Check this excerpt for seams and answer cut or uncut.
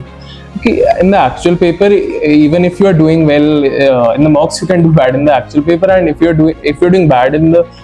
uncut